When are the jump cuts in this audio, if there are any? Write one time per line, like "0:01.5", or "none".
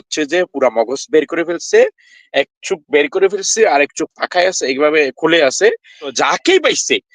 0:06.1